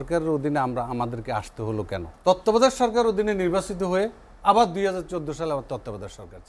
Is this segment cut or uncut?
cut